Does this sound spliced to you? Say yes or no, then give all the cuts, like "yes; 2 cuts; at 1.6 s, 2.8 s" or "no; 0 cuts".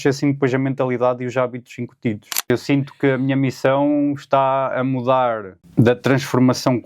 yes; 2 cuts; at 2.5 s, 5.6 s